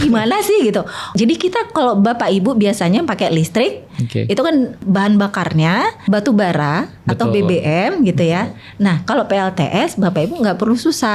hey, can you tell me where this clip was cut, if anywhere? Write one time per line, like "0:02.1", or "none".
0:01.1
0:04.8
0:06.0